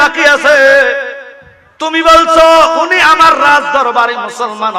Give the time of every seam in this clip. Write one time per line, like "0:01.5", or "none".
none